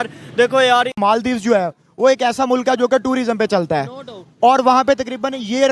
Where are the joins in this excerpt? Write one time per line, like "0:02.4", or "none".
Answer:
0:00.9